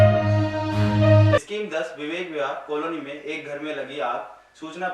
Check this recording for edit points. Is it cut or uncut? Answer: cut